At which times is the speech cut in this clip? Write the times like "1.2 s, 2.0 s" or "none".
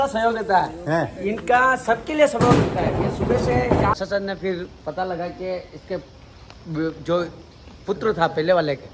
4.0 s